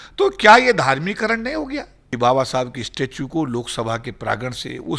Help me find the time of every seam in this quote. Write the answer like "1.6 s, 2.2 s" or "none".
2.0 s